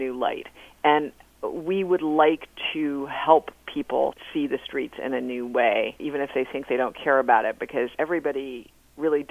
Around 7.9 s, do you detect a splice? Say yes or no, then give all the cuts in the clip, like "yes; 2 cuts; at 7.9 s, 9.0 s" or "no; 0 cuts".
yes; 3 cuts; at 4.2 s, 6.0 s, 7.9 s